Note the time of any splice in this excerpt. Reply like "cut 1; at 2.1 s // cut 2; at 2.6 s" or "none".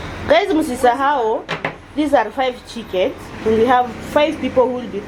none